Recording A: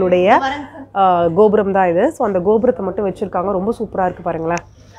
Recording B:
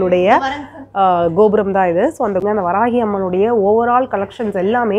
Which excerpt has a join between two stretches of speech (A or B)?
B